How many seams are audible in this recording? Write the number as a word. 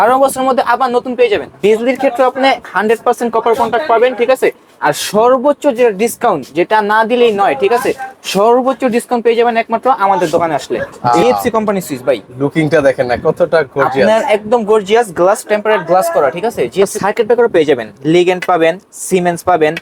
three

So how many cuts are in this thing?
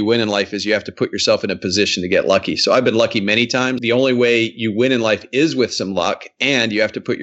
one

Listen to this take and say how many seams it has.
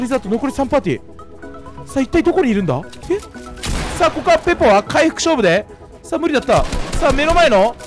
one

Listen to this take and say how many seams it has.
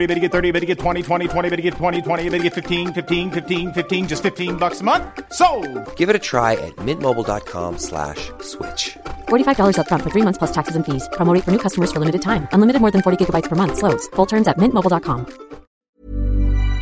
one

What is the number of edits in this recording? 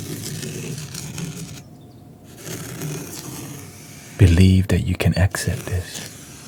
zero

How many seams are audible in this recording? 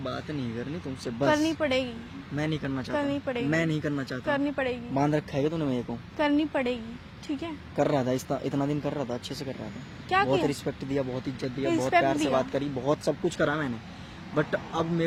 zero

